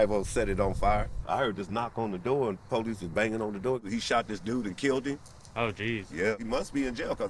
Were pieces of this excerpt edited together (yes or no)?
yes